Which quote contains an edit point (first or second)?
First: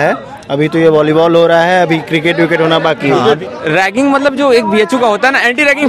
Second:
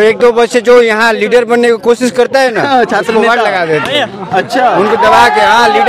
first